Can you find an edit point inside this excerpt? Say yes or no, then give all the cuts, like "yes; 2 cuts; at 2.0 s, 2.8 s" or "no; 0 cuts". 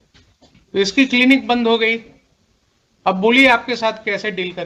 yes; 2 cuts; at 0.9 s, 3.2 s